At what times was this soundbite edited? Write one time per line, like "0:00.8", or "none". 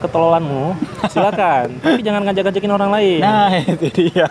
none

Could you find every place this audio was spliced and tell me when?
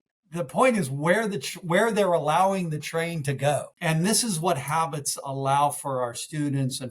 0:03.7

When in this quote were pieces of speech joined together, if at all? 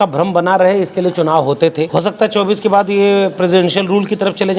0:01.9

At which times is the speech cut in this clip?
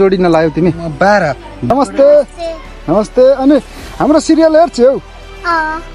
0:01.7

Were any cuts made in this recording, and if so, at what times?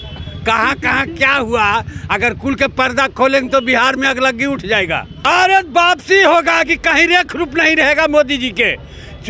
0:05.2

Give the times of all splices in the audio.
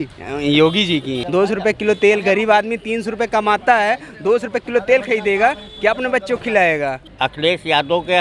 0:01.2
0:07.0

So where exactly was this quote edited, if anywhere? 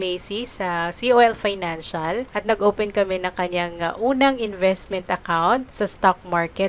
0:02.3
0:05.7

